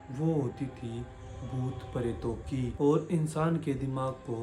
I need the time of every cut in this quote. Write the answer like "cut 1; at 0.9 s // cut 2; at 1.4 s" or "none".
cut 1; at 2.7 s